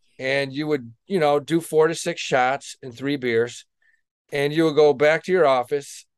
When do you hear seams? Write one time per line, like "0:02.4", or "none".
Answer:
none

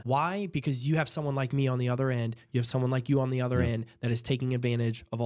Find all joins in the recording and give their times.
none

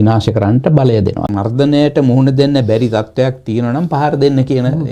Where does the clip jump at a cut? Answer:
0:01.3

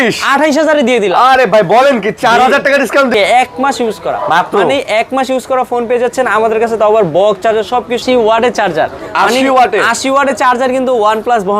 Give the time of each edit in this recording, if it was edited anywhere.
0:03.1
0:08.0

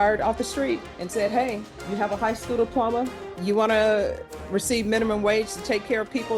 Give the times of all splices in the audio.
0:00.9
0:01.7
0:03.3

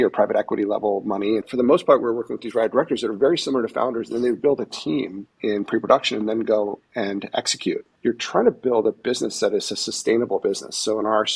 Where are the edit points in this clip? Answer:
0:01.4
0:05.2
0:07.9

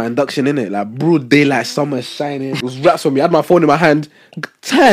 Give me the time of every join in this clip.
0:02.7

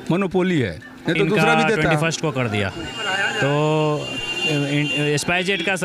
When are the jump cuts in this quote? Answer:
0:01.9

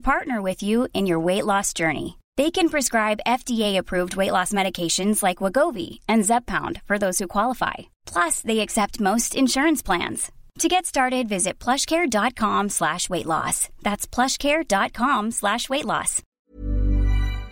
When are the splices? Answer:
0:16.4

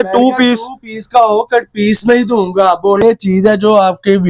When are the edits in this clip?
0:03.0

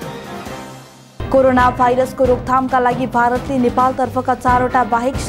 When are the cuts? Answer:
0:00.9

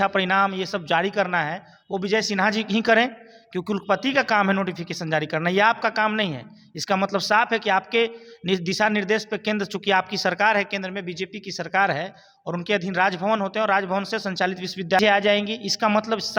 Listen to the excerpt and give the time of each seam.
none

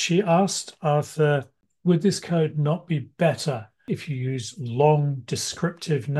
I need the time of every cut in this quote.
0:01.6
0:03.8

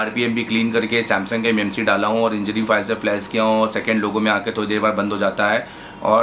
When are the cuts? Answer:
none

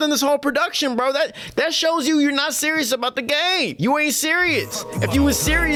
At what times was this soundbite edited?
none

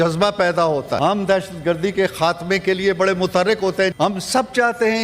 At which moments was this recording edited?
0:01.0
0:03.9

